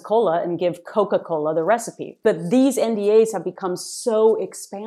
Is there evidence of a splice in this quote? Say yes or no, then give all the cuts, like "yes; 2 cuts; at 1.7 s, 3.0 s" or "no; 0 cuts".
yes; 1 cut; at 2.1 s